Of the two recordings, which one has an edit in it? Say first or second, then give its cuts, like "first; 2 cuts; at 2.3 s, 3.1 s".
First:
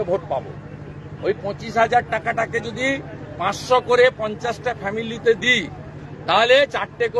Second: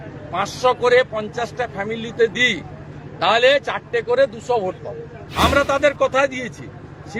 second; 1 cut; at 5.2 s